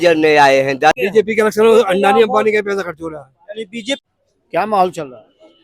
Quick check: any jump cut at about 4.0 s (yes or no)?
yes